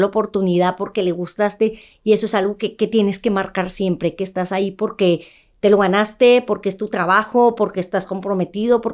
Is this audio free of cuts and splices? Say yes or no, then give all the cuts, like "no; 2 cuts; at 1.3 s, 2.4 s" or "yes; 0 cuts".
yes; 0 cuts